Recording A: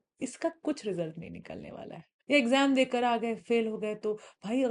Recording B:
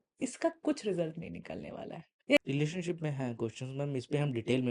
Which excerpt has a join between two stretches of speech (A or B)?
B